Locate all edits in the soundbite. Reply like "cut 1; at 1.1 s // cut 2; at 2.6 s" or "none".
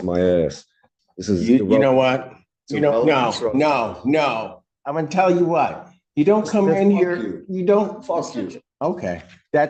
none